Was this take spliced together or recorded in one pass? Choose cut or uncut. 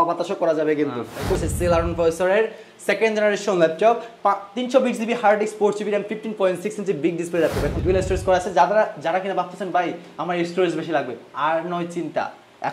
cut